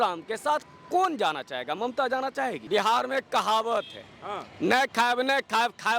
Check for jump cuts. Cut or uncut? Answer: cut